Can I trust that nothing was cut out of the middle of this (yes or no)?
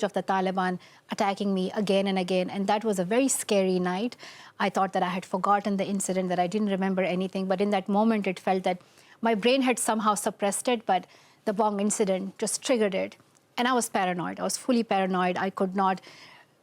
yes